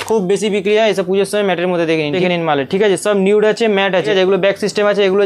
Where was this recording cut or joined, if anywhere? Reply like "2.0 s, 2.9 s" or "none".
2.2 s, 4.1 s